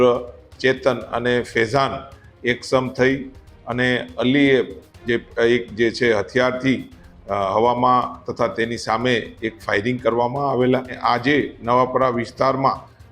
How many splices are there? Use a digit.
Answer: 1